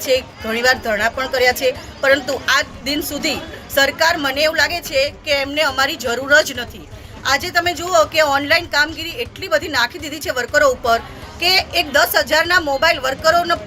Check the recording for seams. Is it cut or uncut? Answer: uncut